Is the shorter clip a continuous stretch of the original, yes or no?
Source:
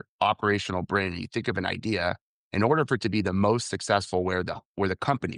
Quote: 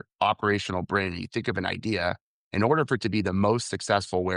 yes